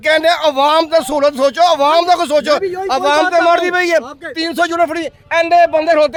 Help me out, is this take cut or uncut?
uncut